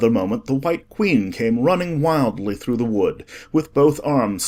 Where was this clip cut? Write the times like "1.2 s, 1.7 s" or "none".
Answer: none